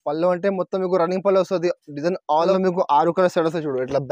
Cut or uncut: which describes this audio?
cut